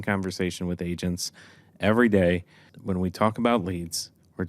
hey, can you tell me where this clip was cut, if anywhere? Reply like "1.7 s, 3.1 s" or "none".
2.7 s